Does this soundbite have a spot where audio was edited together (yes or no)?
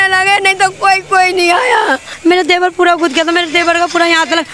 yes